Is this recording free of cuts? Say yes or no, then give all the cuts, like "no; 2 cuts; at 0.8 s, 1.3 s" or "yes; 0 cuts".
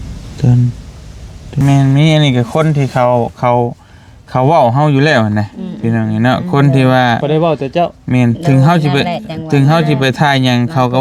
no; 1 cut; at 1.6 s